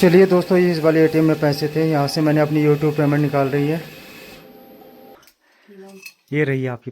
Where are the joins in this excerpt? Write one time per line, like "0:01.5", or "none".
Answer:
0:05.1